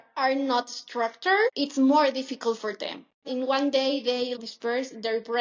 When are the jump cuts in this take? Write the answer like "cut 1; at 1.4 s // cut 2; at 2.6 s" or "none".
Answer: cut 1; at 1.5 s // cut 2; at 3.2 s // cut 3; at 4.4 s